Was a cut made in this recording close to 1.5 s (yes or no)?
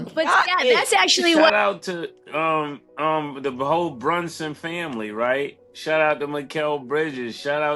yes